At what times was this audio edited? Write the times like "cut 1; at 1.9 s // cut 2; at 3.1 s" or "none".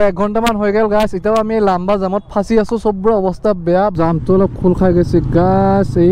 cut 1; at 3.9 s